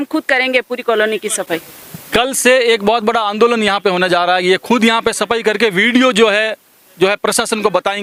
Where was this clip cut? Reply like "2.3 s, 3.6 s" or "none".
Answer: none